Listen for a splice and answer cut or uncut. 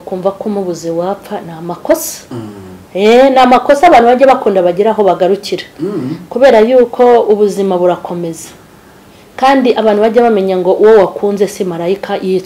uncut